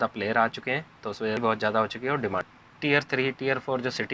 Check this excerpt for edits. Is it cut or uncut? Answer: cut